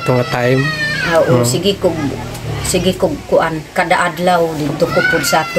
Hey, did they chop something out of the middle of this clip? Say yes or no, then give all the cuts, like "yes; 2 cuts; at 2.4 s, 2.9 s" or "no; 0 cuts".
no; 0 cuts